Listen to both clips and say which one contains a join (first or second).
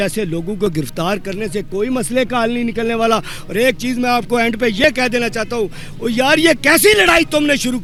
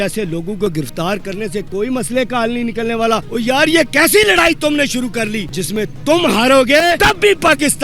second